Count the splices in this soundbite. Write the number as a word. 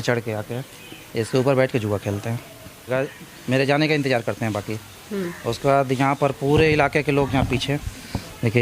one